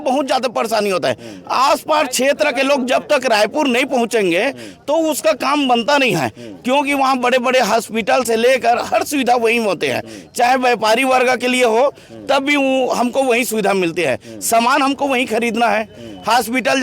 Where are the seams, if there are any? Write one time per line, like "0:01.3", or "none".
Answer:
none